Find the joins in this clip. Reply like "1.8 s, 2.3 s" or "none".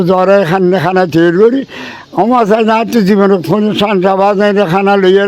none